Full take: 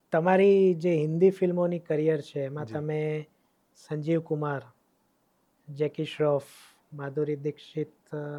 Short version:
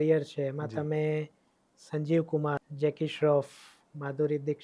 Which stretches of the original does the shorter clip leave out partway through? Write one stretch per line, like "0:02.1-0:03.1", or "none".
0:04.7-0:05.7